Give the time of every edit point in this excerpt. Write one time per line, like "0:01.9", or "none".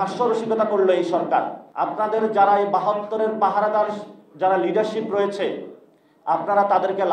0:01.6